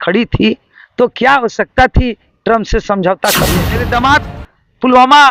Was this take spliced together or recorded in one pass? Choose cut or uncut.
cut